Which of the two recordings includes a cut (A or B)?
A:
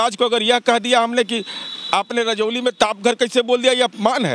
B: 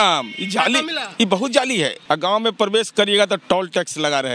B